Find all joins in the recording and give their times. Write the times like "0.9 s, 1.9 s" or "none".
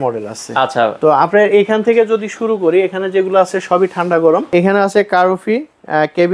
4.5 s